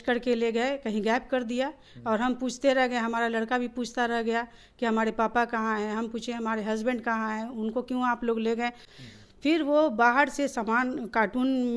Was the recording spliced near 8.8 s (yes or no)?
yes